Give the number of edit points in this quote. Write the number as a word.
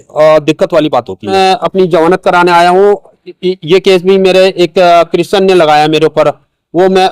one